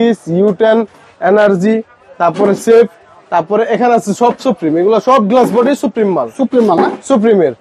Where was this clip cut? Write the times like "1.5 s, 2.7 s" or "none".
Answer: none